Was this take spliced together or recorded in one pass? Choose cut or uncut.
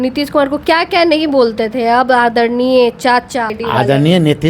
cut